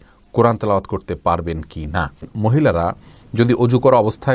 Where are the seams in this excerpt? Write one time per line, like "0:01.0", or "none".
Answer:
0:02.3